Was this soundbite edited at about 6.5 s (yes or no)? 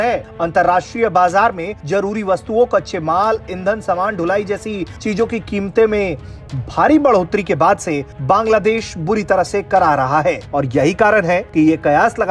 no